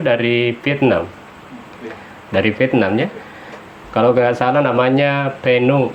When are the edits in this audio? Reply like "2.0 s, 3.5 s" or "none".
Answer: none